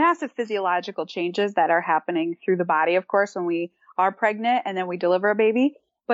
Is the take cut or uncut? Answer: uncut